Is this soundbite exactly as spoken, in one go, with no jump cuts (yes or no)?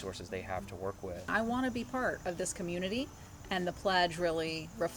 no